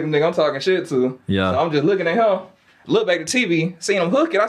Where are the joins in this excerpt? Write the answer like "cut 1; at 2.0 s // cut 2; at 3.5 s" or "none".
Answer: none